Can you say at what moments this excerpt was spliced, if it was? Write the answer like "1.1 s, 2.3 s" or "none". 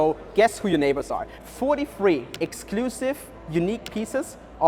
1.2 s